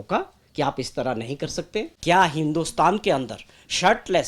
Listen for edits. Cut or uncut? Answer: cut